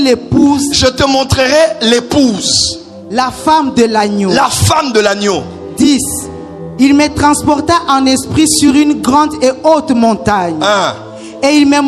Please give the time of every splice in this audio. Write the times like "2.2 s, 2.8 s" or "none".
none